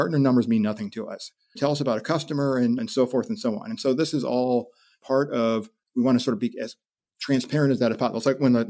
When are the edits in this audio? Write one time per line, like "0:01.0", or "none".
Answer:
0:01.6
0:05.0